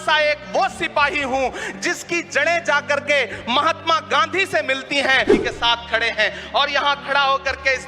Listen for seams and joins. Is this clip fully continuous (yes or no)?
no